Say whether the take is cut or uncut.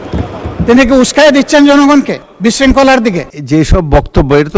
cut